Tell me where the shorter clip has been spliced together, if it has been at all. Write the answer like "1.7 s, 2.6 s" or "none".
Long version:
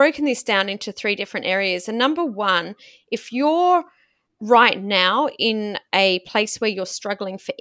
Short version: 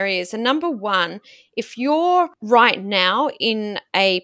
2.4 s